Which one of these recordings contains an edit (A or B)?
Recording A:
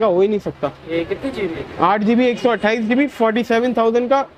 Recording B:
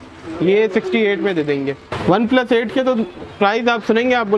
B